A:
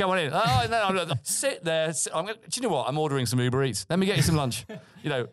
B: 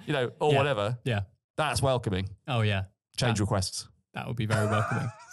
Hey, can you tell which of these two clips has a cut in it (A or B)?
A